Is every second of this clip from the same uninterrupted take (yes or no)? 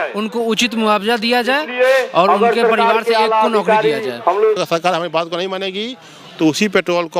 no